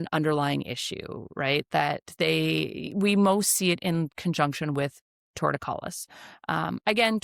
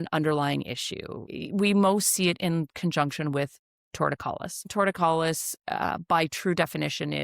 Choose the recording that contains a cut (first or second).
second